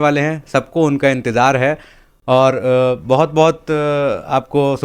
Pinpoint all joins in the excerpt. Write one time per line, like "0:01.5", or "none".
none